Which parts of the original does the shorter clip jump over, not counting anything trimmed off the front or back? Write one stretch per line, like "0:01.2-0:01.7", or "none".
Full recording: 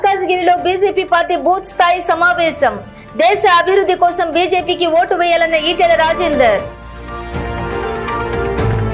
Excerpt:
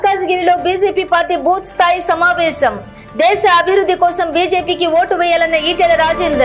none